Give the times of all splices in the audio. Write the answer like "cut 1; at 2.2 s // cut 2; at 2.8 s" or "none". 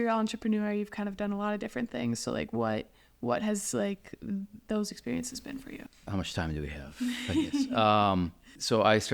cut 1; at 5.9 s